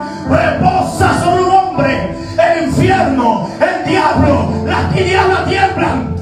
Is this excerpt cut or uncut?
uncut